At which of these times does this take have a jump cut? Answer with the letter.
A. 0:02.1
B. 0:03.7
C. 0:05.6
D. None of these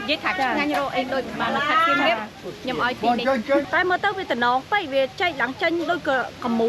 B